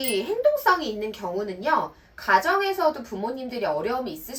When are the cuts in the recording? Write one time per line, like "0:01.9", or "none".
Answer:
none